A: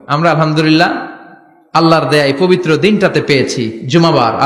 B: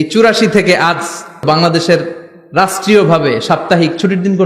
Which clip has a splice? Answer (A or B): B